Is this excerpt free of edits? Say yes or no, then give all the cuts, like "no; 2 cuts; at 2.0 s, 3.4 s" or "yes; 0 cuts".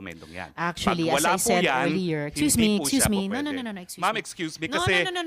yes; 0 cuts